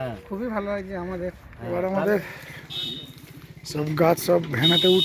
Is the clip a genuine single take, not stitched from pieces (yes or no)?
no